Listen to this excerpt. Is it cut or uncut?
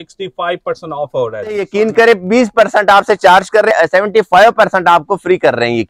cut